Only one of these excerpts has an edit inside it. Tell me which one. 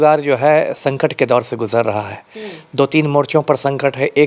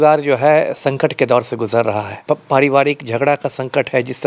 second; 1 cut; at 2.2 s

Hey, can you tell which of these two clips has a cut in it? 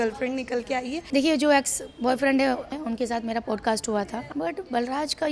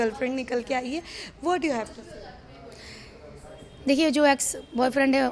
first; 3 cuts; at 1.0 s, 2.7 s, 4.2 s

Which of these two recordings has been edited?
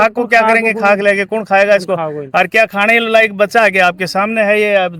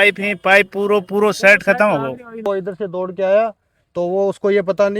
second; 1 cut; at 2.4 s

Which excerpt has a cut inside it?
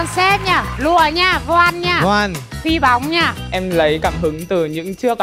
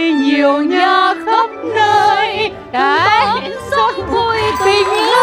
first; 1 cut; at 3.5 s

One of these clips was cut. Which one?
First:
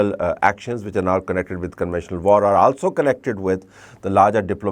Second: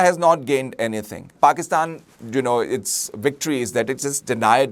second; 1 cut; at 1.3 s

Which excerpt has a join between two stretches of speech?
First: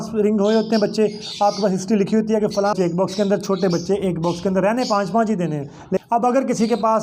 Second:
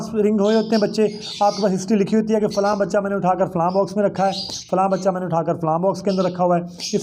first; 2 cuts; at 2.7 s, 6.0 s

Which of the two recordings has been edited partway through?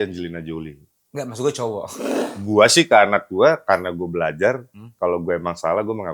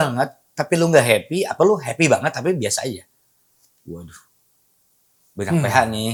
first; 1 cut; at 2.0 s

